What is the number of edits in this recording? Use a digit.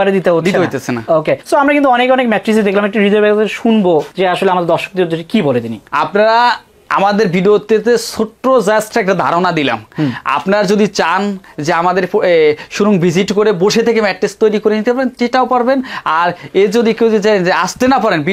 0